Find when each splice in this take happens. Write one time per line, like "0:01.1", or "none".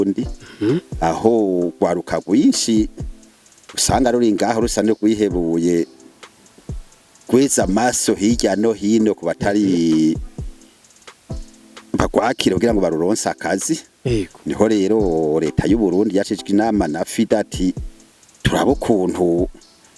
0:10.1
0:11.9